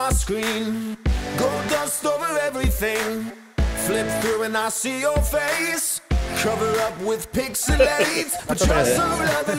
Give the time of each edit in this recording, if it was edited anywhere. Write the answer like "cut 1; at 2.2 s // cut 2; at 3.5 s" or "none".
none